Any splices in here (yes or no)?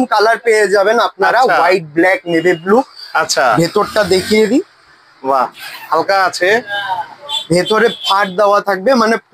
no